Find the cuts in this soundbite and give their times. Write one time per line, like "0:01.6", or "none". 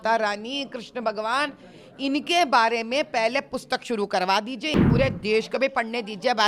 0:04.8